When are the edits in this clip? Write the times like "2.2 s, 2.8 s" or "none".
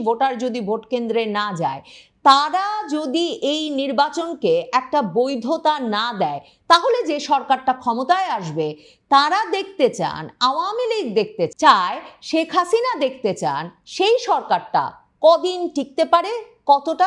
11.5 s